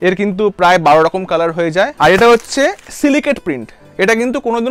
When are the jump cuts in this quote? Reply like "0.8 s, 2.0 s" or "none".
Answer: 1.9 s